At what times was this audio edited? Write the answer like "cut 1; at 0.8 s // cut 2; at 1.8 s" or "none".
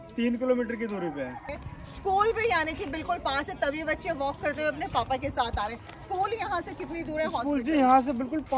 cut 1; at 1.4 s